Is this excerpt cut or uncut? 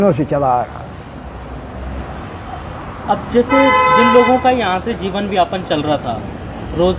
uncut